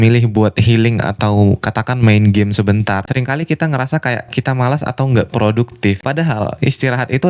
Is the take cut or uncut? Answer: cut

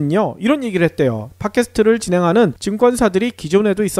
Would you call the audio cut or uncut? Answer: cut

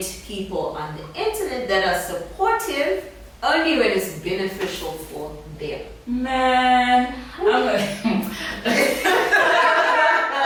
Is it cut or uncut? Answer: uncut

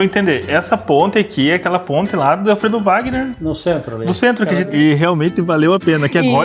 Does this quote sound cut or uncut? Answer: cut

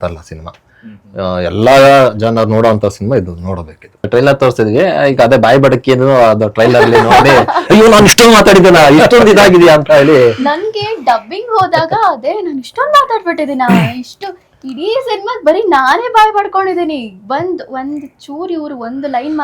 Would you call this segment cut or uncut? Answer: cut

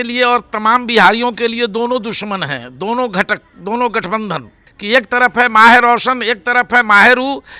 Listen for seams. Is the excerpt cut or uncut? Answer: cut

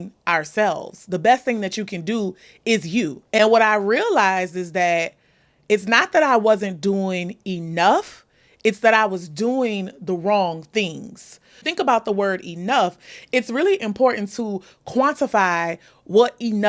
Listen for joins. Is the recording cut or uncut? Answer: cut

